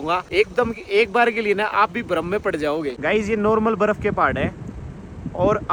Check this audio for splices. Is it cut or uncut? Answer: uncut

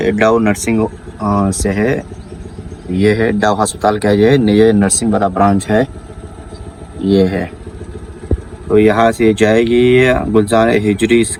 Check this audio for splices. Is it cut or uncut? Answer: uncut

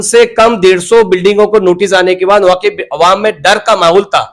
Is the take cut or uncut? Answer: uncut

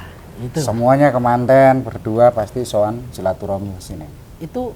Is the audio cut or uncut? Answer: uncut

